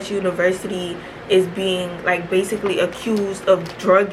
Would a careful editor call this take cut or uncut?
uncut